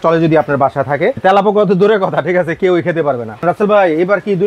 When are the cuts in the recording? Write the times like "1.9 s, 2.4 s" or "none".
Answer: 1.2 s, 3.4 s